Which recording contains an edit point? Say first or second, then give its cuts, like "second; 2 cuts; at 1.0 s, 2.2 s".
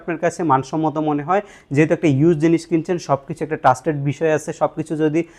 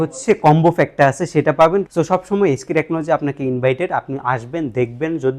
second; 1 cut; at 1.9 s